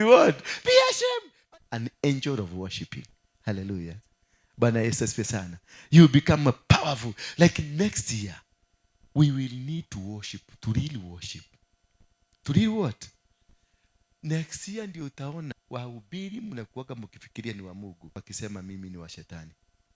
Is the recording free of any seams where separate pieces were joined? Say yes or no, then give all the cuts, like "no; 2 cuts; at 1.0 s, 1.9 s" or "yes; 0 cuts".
no; 3 cuts; at 1.0 s, 15.6 s, 18.2 s